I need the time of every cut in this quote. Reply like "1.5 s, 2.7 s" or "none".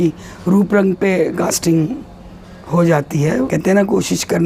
3.5 s

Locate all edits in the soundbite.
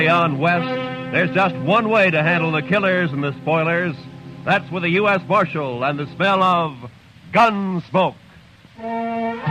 none

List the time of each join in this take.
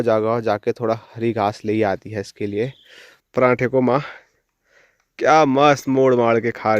3.2 s

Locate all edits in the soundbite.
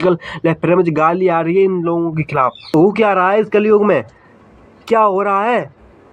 2.7 s

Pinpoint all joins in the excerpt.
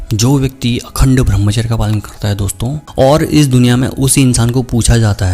2.8 s

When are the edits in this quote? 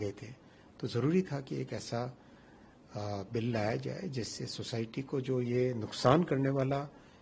none

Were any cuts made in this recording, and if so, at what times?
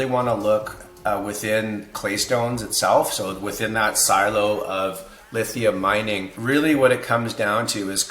6.3 s

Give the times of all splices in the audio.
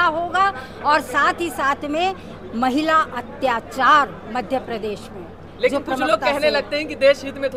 none

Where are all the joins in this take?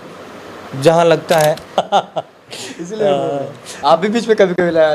1.8 s

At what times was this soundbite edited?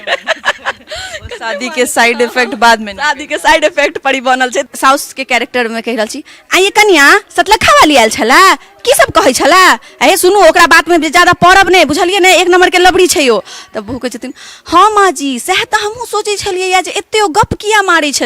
4.6 s

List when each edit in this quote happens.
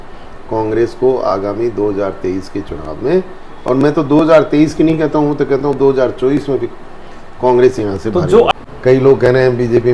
8.5 s

